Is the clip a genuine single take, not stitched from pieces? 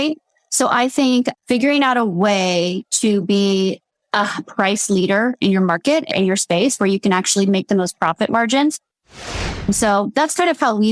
no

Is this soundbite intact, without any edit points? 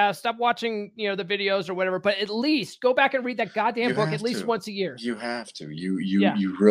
yes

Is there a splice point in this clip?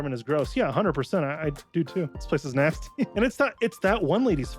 yes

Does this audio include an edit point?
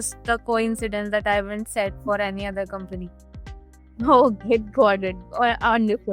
no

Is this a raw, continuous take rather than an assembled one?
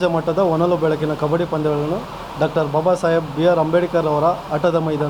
yes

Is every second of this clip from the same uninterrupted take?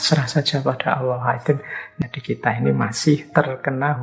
no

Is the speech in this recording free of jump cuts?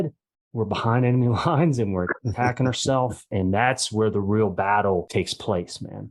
no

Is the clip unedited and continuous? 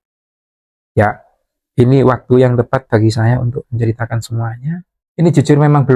no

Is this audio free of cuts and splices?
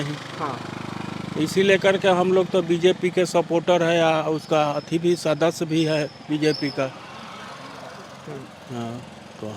yes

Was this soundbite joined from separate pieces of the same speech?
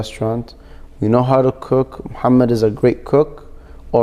no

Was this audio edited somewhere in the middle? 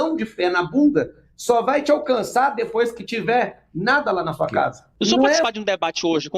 yes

